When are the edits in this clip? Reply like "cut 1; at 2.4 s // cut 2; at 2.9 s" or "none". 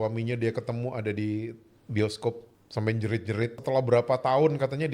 cut 1; at 2.5 s // cut 2; at 3.6 s